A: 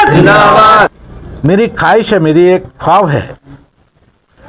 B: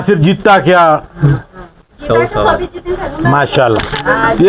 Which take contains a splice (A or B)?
A